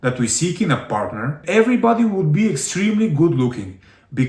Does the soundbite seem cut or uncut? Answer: cut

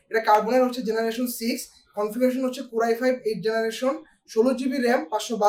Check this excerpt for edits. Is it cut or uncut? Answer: uncut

